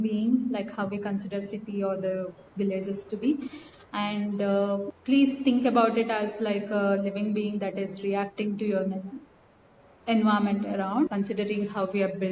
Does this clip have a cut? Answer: yes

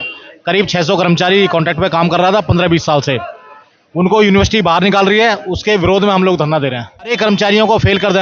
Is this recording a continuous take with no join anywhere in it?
no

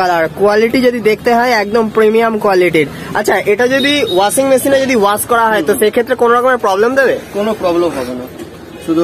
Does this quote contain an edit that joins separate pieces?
no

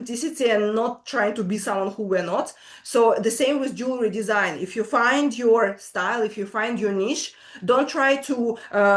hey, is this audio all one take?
yes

